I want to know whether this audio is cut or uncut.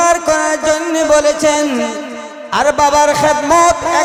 uncut